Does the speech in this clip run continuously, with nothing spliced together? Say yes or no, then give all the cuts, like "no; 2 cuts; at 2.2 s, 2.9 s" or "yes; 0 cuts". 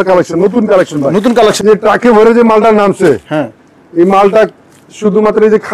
no; 1 cut; at 1.6 s